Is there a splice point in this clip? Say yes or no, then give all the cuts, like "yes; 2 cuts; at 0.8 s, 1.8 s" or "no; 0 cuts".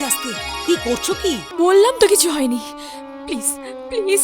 yes; 1 cut; at 1.5 s